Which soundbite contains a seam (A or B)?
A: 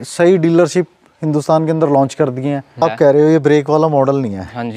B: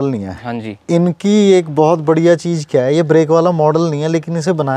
A